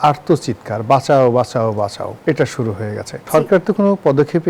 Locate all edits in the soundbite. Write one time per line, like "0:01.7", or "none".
0:03.1